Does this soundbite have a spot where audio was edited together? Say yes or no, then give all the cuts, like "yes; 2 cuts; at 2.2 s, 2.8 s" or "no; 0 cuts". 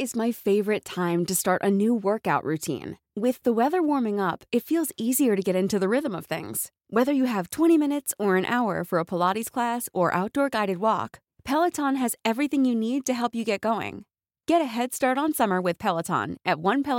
no; 0 cuts